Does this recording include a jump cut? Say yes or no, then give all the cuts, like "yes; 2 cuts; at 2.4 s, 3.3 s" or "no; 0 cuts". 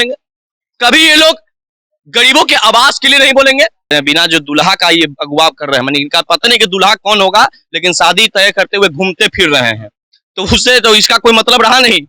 yes; 1 cut; at 3.9 s